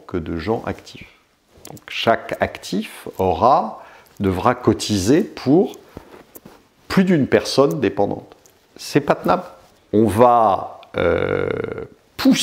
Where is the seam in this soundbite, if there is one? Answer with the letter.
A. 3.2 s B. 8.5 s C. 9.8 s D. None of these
C